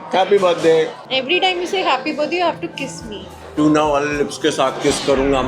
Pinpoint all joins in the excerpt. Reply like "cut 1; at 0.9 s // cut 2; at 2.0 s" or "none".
cut 1; at 1.0 s // cut 2; at 3.3 s